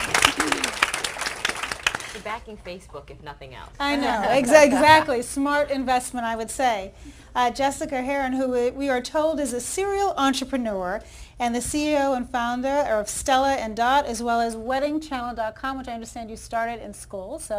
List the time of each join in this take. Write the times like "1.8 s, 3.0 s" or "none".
14.6 s